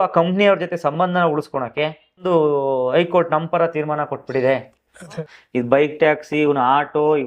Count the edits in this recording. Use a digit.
2